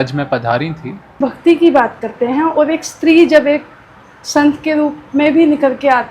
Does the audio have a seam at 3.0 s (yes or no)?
no